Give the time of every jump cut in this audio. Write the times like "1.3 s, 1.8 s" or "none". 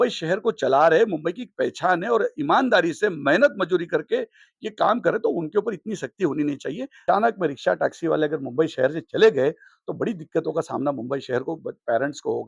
7.0 s